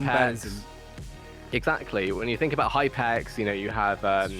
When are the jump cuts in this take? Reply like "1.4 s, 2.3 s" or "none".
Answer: 2.7 s